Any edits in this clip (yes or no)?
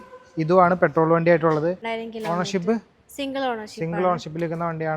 yes